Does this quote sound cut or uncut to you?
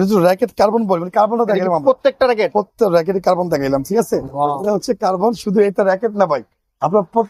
uncut